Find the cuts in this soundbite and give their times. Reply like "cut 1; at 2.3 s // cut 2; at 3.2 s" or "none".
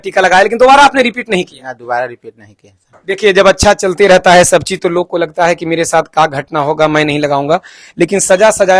none